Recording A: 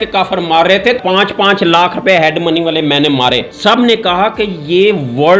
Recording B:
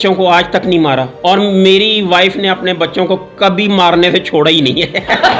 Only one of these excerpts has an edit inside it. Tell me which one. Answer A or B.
A